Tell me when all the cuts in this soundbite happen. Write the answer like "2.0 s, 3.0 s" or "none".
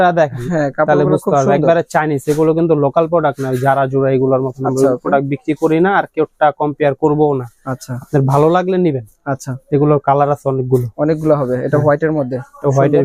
none